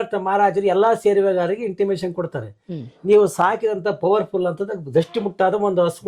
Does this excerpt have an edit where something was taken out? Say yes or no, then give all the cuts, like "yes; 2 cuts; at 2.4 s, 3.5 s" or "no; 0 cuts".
no; 0 cuts